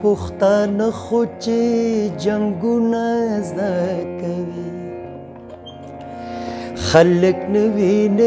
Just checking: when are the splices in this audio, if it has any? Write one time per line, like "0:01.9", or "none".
none